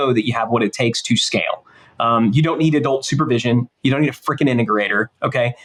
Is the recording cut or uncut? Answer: uncut